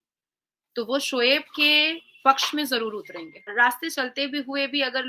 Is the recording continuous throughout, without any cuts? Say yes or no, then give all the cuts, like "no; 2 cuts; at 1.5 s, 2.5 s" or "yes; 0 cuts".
no; 1 cut; at 3.5 s